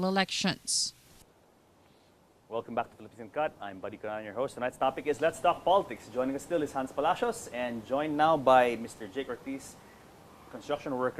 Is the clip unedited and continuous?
no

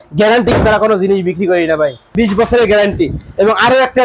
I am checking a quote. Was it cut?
yes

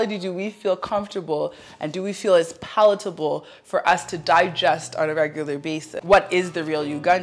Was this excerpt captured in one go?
no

